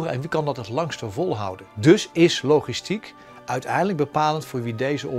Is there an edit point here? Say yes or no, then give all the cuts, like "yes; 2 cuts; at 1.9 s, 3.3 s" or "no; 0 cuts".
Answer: no; 0 cuts